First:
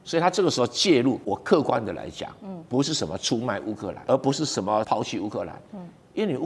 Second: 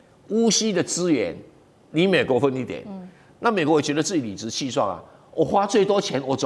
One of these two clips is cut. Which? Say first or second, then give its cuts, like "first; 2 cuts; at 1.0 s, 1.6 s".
first; 3 cuts; at 1.2 s, 3.9 s, 4.9 s